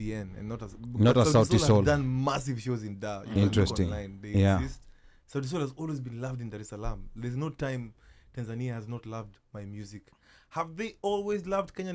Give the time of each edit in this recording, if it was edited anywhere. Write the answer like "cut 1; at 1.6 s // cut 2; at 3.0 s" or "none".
none

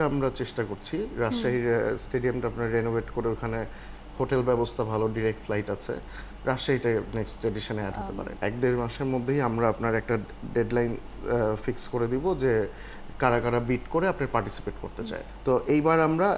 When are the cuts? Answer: cut 1; at 8.3 s // cut 2; at 15.2 s

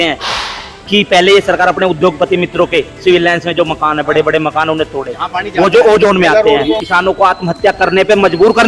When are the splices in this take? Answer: cut 1; at 6.8 s

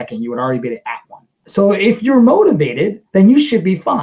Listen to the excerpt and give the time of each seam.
cut 1; at 1.4 s // cut 2; at 3.0 s

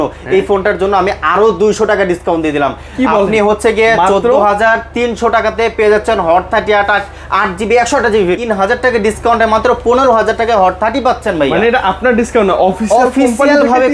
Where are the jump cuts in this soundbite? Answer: cut 1; at 8.4 s

